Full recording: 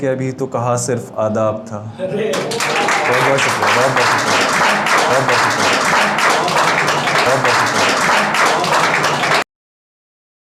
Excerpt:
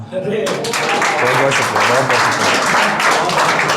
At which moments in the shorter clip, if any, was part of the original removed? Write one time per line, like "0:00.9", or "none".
0:02.8